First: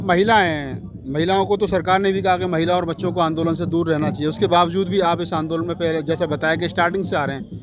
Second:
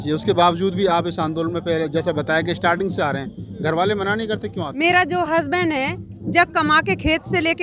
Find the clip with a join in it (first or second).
second